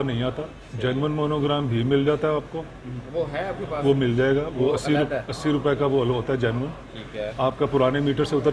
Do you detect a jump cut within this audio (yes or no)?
no